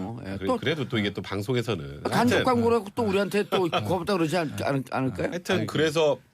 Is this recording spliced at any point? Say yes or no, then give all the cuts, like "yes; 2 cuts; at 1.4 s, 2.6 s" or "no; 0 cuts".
yes; 1 cut; at 1.0 s